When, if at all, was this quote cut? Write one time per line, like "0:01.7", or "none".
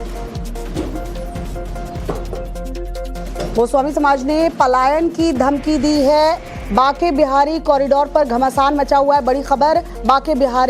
0:01.5